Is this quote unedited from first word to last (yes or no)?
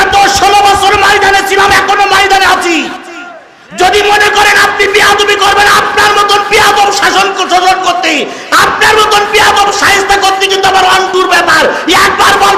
yes